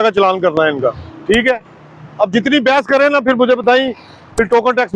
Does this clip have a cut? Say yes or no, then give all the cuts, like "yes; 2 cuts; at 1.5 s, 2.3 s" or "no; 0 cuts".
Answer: no; 0 cuts